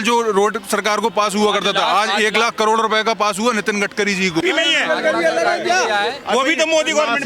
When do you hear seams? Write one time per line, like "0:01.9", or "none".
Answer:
0:04.4